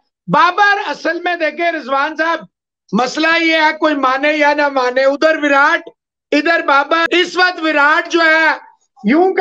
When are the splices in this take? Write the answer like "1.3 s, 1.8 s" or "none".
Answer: 7.0 s